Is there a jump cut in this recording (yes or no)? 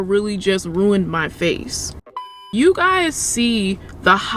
yes